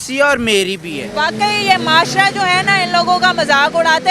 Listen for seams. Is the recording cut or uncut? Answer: cut